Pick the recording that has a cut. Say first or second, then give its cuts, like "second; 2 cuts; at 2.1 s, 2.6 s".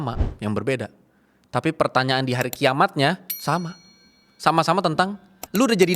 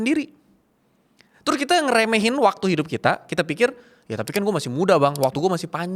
first; 1 cut; at 3.3 s